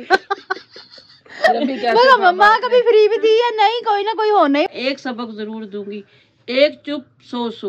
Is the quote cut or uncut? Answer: cut